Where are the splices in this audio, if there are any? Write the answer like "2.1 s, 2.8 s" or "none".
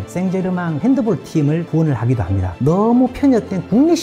2.5 s